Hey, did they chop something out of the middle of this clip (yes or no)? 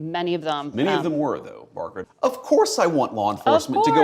yes